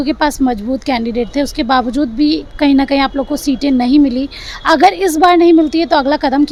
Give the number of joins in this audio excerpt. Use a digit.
0